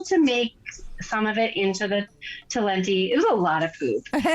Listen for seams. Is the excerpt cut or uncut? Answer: uncut